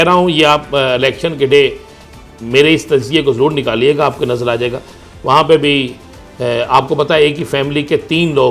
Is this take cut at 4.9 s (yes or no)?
yes